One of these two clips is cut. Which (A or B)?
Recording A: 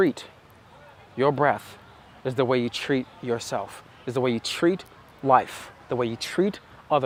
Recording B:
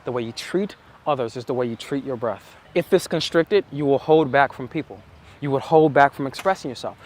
B